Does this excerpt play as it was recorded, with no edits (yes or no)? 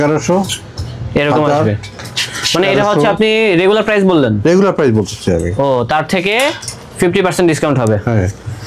yes